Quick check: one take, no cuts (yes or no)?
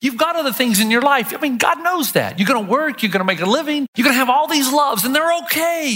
no